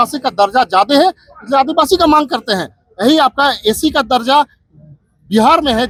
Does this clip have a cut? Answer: no; 0 cuts

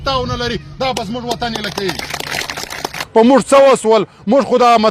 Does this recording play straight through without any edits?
no; 1 cut; at 3.0 s

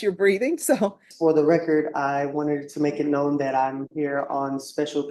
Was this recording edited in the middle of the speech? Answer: yes; 1 cut; at 1.1 s

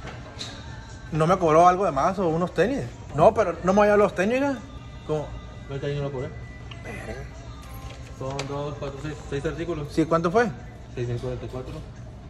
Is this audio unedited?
yes; 0 cuts

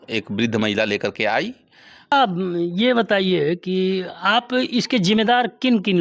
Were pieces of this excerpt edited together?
yes; 1 cut; at 2.1 s

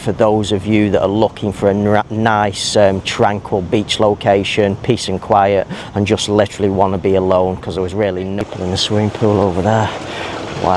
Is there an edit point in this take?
yes; 1 cut; at 8.4 s

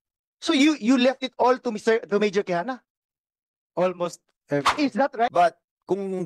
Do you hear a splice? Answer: yes; 1 cut; at 5.3 s

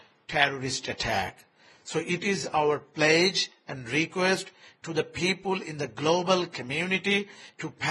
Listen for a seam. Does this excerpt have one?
no; 0 cuts

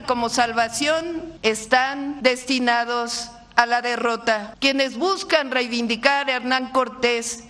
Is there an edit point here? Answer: yes; 3 cuts; at 1.3 s, 2.1 s, 4.5 s

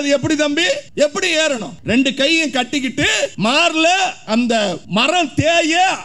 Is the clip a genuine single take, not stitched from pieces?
no; 4 cuts; at 0.9 s, 1.7 s, 3.3 s, 4.8 s

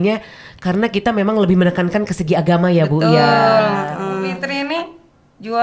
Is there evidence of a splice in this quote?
yes; 1 cut; at 4.4 s

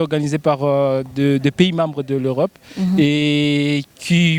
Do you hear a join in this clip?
no; 0 cuts

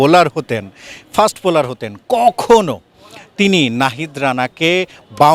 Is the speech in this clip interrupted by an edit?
no; 0 cuts

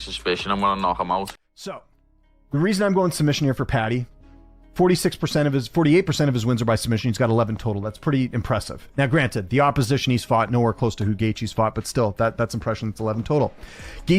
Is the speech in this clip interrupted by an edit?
yes; 1 cut; at 1.1 s

